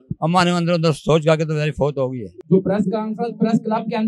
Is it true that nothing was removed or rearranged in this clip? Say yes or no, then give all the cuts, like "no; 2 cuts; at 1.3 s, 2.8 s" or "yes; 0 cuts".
no; 1 cut; at 2.3 s